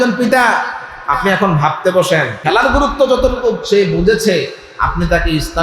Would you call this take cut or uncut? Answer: cut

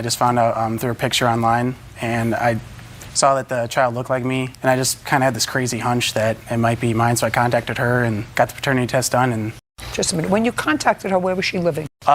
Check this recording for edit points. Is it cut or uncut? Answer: uncut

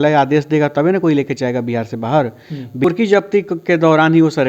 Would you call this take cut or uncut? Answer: cut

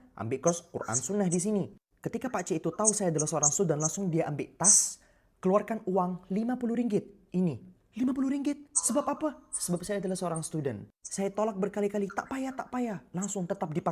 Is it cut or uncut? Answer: uncut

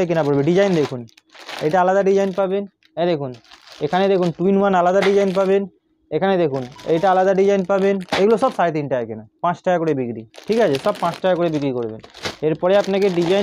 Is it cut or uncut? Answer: uncut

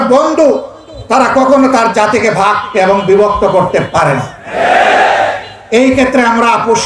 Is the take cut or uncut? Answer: uncut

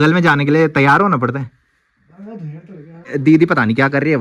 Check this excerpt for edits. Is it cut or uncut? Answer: cut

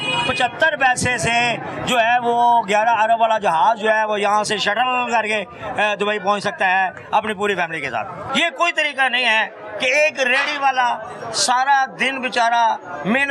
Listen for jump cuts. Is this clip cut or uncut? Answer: cut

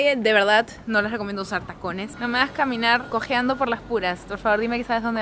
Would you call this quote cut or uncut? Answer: cut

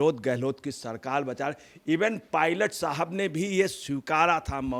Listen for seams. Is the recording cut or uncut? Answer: uncut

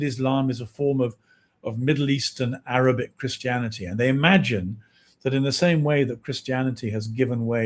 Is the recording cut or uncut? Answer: uncut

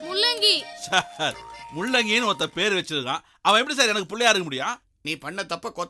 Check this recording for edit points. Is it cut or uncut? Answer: uncut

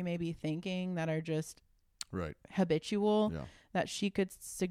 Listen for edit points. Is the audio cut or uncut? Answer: uncut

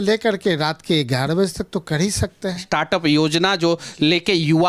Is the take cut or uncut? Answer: cut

